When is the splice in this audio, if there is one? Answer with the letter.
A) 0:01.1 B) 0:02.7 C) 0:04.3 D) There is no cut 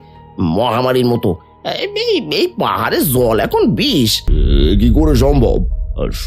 C